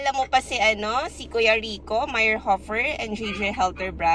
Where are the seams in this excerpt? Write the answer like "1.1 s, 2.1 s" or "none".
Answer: none